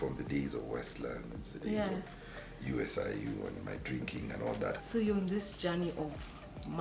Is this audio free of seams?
no; 1 cut; at 4.8 s

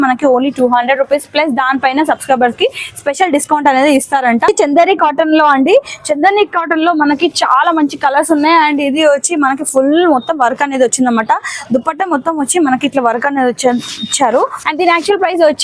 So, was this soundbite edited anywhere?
yes; 2 cuts; at 4.5 s, 14.6 s

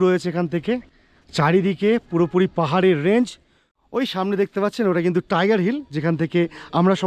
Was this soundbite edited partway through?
no; 0 cuts

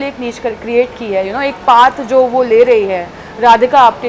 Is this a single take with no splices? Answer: yes; 0 cuts

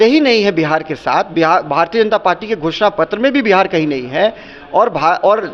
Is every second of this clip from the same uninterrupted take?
yes; 0 cuts

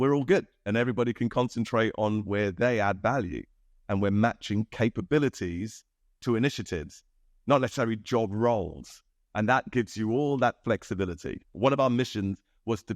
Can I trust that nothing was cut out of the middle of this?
no; 1 cut; at 11.5 s

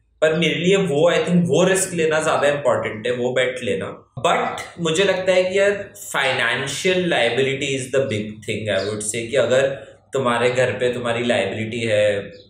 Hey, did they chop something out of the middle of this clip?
yes; 1 cut; at 4.0 s

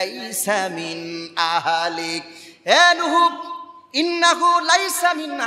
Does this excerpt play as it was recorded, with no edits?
yes; 0 cuts

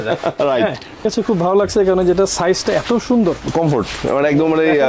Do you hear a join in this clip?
yes; 1 cut; at 1.1 s

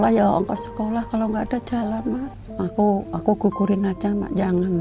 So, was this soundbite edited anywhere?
yes; 1 cut; at 2.4 s

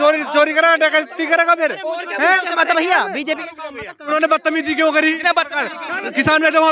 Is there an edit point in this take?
yes; 1 cut; at 4.1 s

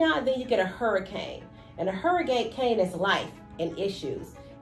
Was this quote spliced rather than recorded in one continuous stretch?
no; 0 cuts

